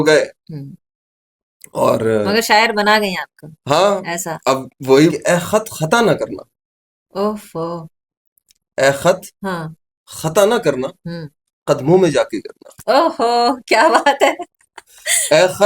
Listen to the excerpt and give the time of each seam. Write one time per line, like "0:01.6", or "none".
0:05.1